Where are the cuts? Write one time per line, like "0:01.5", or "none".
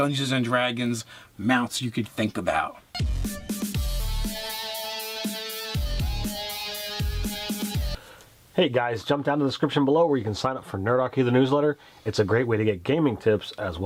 none